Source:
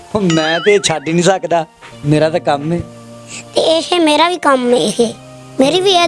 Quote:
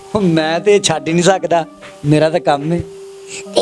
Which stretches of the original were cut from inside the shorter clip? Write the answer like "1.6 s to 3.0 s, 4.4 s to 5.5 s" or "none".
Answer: none